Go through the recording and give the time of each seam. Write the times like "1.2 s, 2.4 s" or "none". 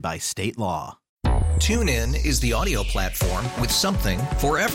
1.0 s